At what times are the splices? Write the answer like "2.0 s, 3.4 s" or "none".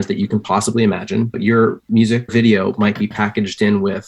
1.4 s, 2.3 s

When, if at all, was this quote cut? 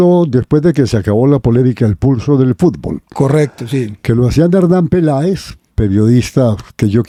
none

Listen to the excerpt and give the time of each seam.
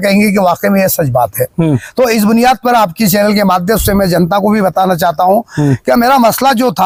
none

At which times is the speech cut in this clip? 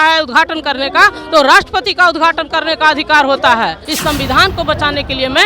3.8 s

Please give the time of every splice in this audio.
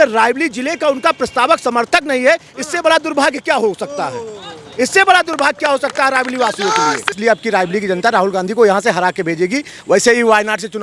7.2 s

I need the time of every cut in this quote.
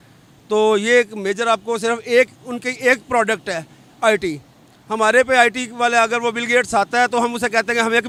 none

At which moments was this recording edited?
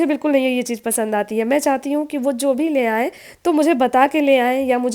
none

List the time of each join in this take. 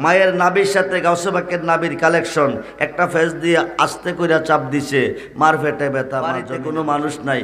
6.5 s

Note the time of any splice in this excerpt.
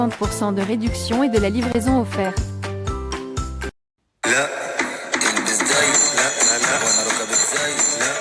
3.8 s

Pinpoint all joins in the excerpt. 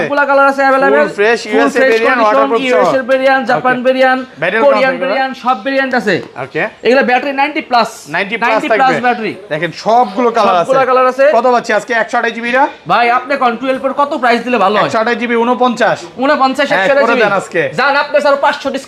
none

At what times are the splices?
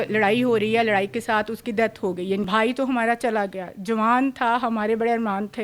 2.4 s

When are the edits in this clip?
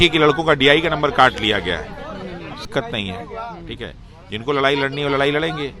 2.7 s

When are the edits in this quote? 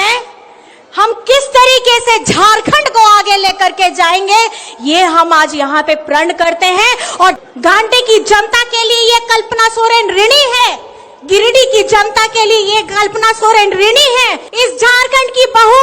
7.4 s, 14.4 s

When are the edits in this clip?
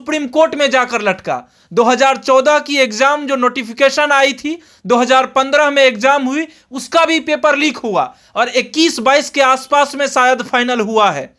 none

